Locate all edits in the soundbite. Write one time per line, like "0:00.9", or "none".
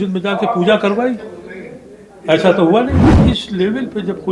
0:03.1